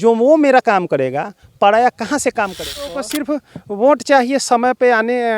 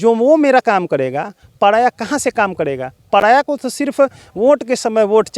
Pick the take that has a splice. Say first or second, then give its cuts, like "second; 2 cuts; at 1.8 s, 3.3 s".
first; 1 cut; at 3.0 s